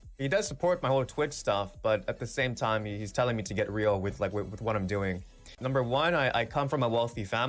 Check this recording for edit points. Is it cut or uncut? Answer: uncut